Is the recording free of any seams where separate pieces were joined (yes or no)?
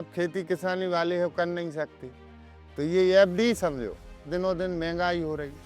no